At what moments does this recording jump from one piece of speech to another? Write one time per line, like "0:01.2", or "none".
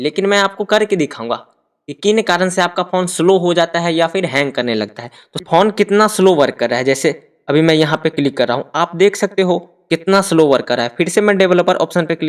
0:05.4